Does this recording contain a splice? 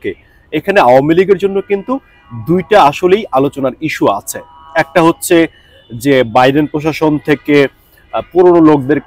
no; 0 cuts

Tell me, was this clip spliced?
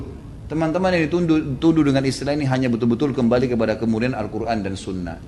no; 0 cuts

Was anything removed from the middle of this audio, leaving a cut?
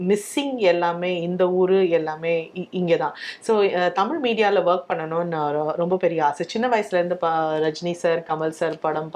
no; 0 cuts

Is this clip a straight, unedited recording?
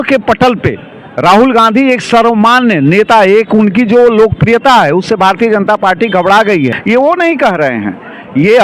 no; 1 cut; at 6.8 s

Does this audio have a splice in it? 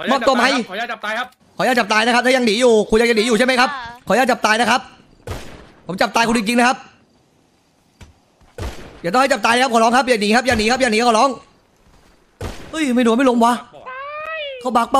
no; 0 cuts

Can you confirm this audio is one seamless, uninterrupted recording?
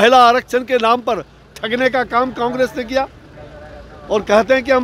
yes; 0 cuts

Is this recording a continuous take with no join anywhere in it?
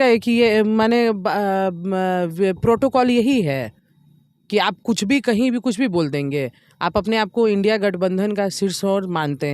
yes; 0 cuts

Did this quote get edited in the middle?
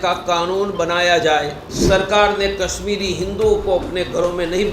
yes; 1 cut; at 1.7 s

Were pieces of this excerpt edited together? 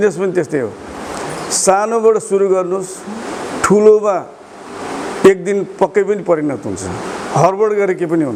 no; 0 cuts

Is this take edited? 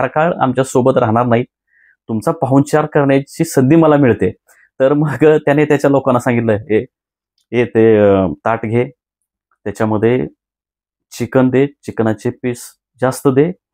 no; 0 cuts

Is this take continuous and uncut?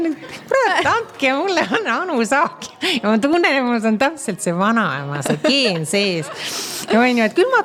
yes; 0 cuts

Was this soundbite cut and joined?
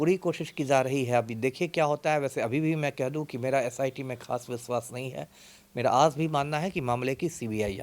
no; 0 cuts

